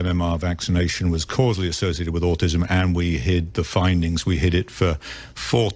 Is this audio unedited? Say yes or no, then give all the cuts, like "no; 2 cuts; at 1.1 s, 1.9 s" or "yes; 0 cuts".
yes; 0 cuts